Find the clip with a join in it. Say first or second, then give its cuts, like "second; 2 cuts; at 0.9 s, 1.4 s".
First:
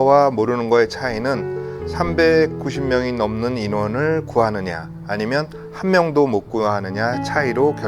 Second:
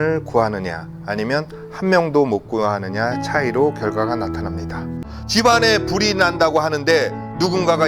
second; 1 cut; at 5.0 s